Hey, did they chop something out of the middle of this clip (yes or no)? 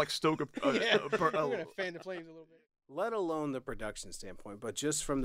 yes